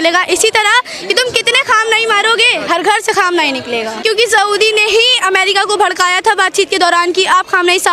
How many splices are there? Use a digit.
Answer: 1